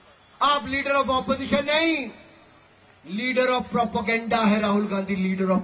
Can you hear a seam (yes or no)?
no